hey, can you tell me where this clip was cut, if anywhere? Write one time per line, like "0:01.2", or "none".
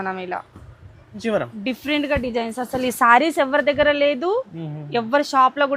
0:01.2